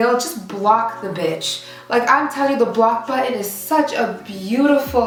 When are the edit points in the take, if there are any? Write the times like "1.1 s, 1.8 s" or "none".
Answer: none